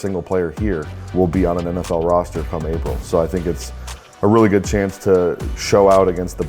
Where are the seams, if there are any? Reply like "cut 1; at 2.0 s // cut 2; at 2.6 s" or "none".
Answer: cut 1; at 1.0 s // cut 2; at 5.5 s